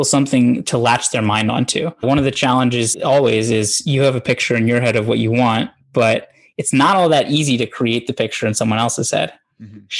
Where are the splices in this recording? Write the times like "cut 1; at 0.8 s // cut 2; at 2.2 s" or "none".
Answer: cut 1; at 2.9 s